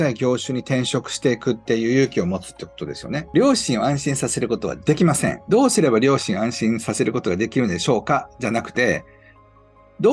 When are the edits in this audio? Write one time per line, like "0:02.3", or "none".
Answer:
0:03.2
0:05.4